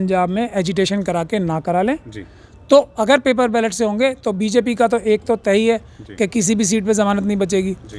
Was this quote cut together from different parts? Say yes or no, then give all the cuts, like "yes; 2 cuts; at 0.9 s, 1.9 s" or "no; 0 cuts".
no; 0 cuts